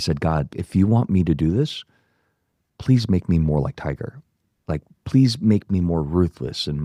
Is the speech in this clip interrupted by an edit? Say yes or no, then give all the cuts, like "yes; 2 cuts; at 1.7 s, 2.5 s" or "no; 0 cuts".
no; 0 cuts